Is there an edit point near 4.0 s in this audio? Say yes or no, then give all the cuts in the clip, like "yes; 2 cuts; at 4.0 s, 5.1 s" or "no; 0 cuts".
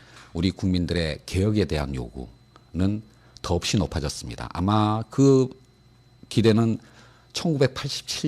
yes; 1 cut; at 4.0 s